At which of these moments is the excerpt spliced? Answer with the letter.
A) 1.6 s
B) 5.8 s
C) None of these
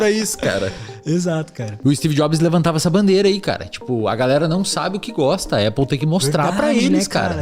A